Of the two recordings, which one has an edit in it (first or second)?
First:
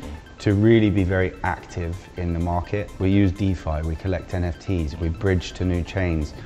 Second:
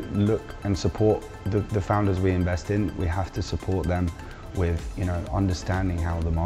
first